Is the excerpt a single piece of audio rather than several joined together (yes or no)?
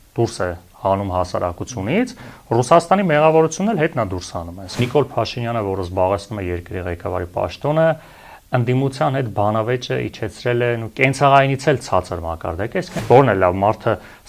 no